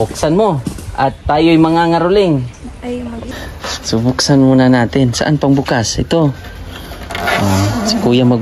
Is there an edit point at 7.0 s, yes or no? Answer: no